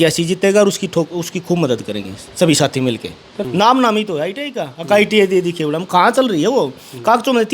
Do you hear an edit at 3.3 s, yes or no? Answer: yes